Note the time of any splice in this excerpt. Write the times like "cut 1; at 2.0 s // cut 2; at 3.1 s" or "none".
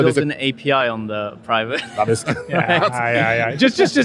none